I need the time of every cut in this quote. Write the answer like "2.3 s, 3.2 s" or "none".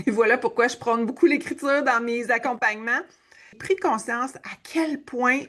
3.5 s